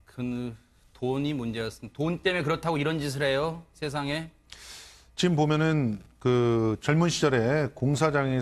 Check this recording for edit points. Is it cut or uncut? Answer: cut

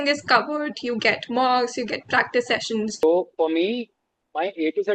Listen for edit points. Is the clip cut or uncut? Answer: cut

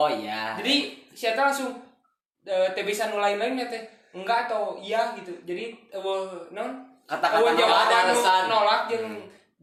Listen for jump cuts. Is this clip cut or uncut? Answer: uncut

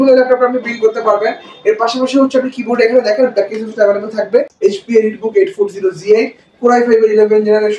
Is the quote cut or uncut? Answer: cut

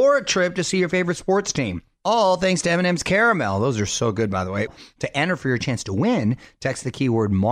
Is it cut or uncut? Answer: cut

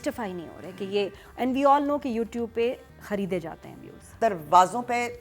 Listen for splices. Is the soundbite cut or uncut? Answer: cut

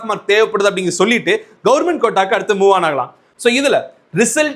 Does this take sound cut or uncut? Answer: uncut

